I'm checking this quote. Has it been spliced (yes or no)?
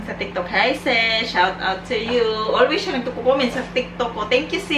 no